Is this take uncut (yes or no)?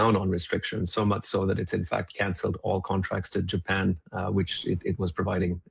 yes